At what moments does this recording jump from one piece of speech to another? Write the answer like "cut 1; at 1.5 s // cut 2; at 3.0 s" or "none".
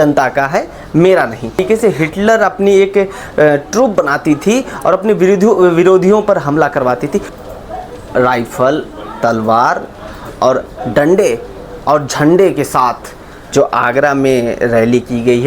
cut 1; at 1.6 s // cut 2; at 7.3 s